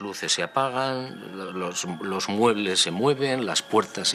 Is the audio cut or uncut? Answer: uncut